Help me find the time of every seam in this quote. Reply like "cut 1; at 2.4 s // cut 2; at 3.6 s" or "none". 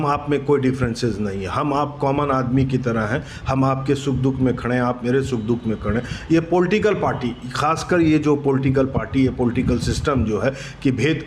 none